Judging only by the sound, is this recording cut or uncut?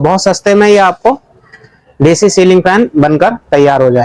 uncut